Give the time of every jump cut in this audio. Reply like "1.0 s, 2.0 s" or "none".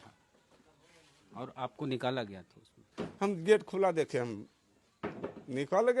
3.0 s